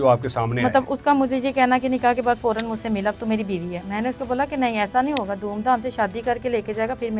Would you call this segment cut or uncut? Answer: uncut